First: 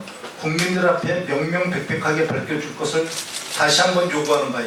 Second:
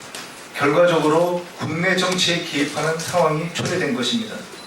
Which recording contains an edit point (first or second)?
second